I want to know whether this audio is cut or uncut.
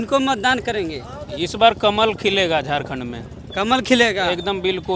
uncut